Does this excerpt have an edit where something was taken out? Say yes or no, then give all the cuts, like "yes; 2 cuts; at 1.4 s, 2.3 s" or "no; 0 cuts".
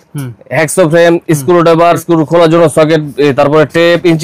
yes; 1 cut; at 2.0 s